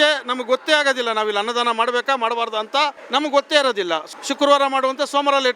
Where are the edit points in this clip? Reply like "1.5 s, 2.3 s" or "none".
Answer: 3.0 s, 4.0 s